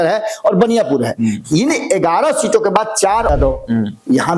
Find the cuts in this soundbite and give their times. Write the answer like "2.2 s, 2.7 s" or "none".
3.3 s